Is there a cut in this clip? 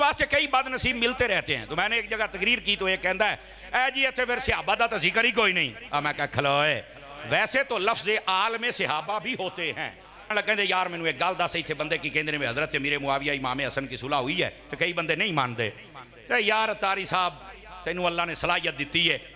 yes; 1 cut; at 10.3 s

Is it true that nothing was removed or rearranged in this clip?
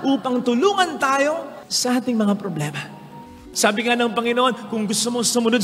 no; 1 cut; at 3.3 s

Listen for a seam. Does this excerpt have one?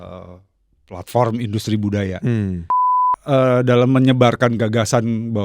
yes; 1 cut; at 3.1 s

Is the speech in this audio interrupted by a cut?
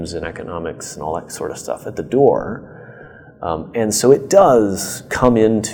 no; 0 cuts

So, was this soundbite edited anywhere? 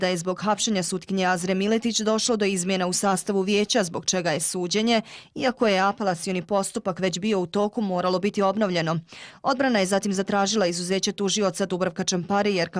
yes; 1 cut; at 9.9 s

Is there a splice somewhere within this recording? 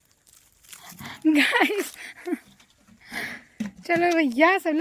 no; 0 cuts

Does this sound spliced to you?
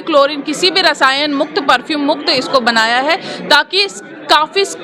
no; 0 cuts

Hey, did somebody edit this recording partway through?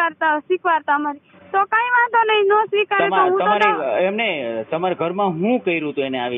no; 0 cuts

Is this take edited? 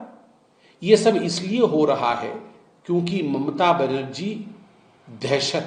no; 0 cuts

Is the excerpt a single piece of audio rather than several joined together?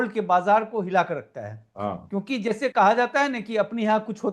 yes; 0 cuts

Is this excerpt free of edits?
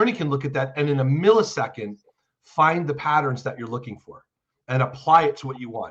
yes; 0 cuts

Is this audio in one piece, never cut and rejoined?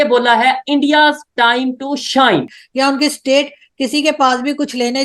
no; 1 cut; at 2.6 s

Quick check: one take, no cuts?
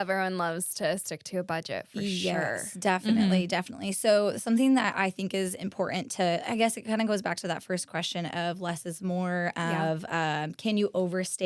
yes; 0 cuts

